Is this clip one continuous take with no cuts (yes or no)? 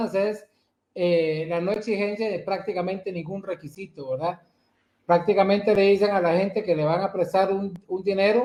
yes